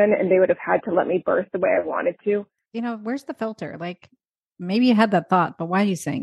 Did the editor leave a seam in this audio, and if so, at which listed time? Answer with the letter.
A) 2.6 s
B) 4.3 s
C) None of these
A